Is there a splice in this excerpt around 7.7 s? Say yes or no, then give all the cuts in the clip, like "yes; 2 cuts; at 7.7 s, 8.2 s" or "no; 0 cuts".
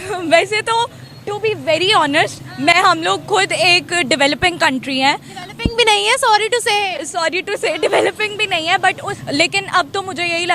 no; 1 cut; at 9.1 s